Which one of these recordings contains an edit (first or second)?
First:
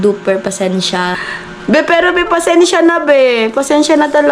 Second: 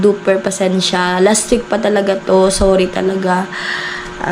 first